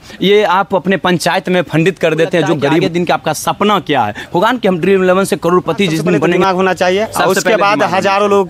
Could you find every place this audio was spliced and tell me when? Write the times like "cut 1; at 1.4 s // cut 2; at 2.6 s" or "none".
cut 1; at 2.8 s // cut 2; at 6.4 s